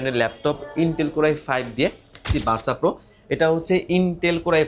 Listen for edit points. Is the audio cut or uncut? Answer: cut